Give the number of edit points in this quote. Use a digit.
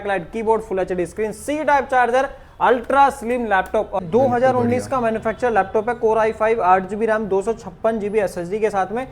1